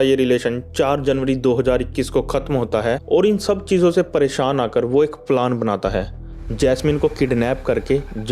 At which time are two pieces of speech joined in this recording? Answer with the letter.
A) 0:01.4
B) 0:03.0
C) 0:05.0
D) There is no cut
B